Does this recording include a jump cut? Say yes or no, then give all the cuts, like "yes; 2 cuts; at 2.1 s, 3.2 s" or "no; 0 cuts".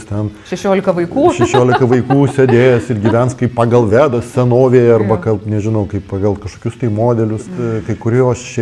yes; 1 cut; at 7.7 s